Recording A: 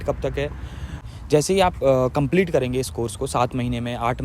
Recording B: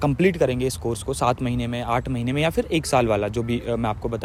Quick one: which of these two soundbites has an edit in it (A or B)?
A